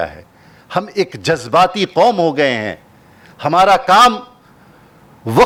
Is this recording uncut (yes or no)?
yes